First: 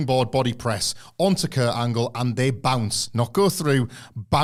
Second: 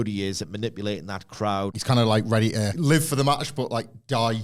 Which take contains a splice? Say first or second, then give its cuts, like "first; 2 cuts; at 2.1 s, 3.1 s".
second; 2 cuts; at 1.8 s, 2.7 s